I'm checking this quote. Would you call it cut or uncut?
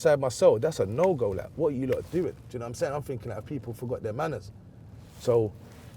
uncut